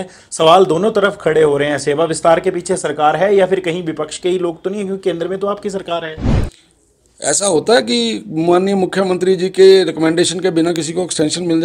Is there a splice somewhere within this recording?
no; 0 cuts

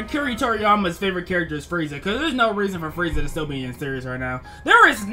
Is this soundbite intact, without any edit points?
yes; 0 cuts

